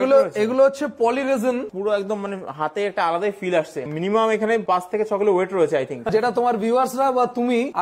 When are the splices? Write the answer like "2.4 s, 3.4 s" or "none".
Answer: 1.6 s, 3.8 s, 6.0 s

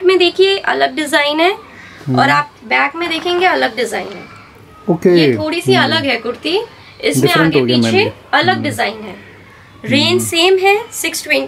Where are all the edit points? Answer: none

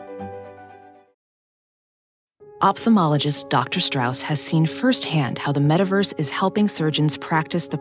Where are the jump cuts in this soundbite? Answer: none

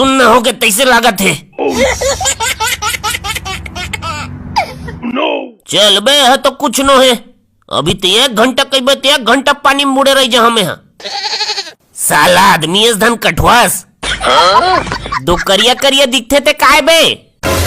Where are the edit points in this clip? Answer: 1.8 s, 5.1 s, 13.9 s

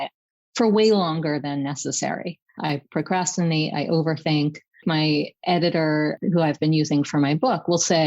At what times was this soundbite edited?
2.7 s, 4.8 s, 6.2 s

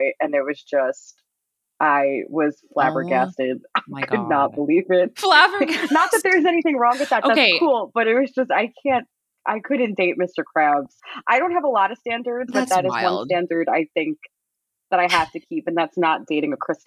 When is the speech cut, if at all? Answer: 11.0 s

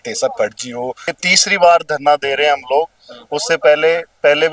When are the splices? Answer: 1.0 s

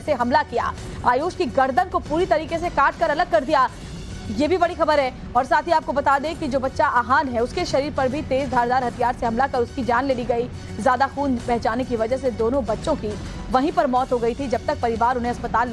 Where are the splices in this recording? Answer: 11.9 s

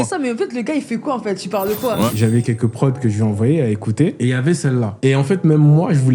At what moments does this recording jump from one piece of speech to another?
2.1 s, 4.2 s, 4.9 s

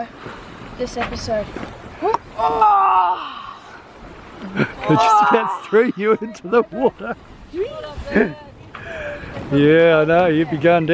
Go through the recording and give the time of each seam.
none

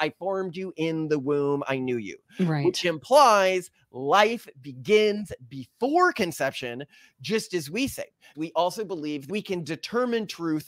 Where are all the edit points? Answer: 8.2 s, 9.3 s

